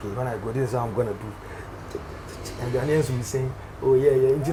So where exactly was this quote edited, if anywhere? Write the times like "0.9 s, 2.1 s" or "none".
none